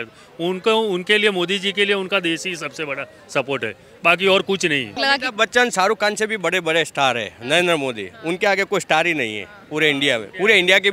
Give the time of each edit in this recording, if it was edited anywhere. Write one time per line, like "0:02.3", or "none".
0:05.0